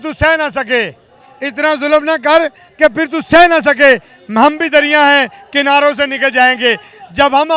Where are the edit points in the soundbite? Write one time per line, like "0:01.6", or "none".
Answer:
none